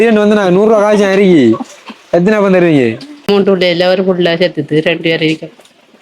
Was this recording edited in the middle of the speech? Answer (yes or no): yes